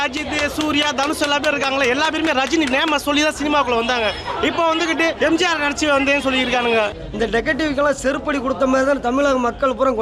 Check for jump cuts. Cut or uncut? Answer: cut